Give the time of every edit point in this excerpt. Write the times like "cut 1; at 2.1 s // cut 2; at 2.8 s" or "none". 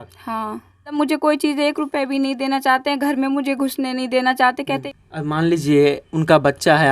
cut 1; at 1.0 s // cut 2; at 4.8 s